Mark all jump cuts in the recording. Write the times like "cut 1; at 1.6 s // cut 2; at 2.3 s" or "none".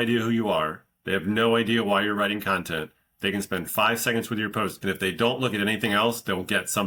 none